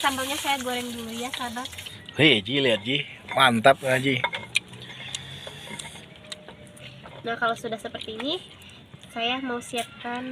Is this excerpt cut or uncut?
cut